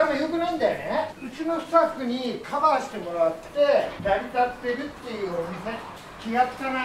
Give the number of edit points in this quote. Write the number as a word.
three